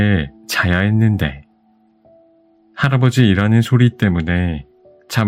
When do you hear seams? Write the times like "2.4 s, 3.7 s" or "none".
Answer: 1.4 s, 2.7 s